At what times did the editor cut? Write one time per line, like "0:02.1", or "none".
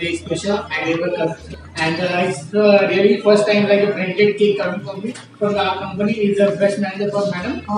0:01.5